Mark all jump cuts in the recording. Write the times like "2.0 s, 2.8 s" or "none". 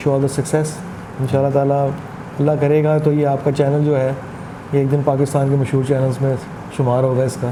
none